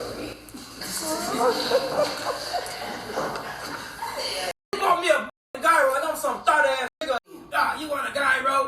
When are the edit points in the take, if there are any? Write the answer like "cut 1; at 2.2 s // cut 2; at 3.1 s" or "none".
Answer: cut 1; at 4.8 s // cut 2; at 7.3 s